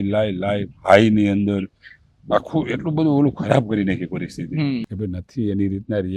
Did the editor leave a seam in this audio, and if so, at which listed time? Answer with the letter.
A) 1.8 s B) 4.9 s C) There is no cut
B